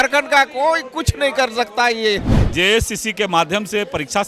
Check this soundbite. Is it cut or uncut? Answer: cut